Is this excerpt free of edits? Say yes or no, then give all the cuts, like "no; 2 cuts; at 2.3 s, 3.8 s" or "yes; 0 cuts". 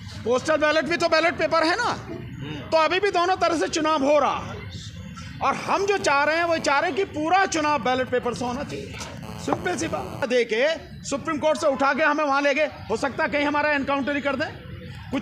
no; 1 cut; at 10.2 s